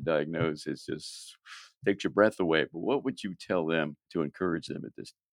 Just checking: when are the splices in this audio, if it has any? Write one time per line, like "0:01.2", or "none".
0:04.0